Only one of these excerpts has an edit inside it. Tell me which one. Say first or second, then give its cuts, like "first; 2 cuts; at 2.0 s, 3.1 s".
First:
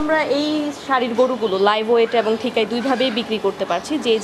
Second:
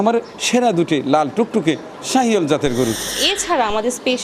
second; 1 cut; at 3.2 s